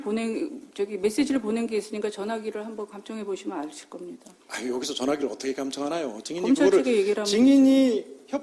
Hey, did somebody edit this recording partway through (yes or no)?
no